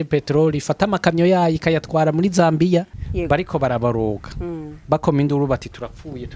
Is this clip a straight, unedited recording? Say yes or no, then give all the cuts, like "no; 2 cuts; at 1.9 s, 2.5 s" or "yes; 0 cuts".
no; 1 cut; at 3.0 s